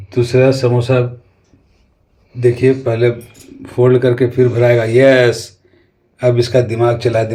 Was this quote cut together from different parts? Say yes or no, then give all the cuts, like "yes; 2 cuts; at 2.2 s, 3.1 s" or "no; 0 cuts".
no; 0 cuts